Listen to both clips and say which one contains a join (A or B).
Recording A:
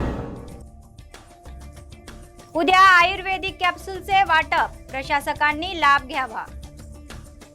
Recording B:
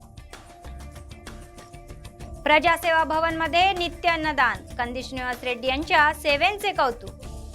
A